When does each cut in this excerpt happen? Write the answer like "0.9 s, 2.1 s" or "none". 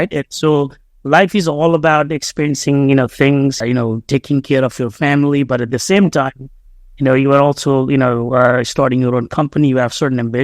3.6 s